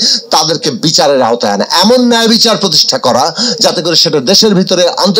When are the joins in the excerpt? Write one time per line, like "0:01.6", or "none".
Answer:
none